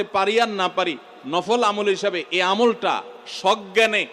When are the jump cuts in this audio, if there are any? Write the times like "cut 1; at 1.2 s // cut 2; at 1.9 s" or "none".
none